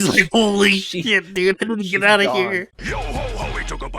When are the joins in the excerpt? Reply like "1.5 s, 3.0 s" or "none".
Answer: 2.7 s